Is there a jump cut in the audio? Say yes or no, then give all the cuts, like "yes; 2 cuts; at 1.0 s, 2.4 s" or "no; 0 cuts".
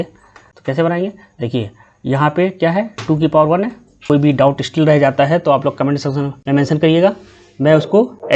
yes; 1 cut; at 4.0 s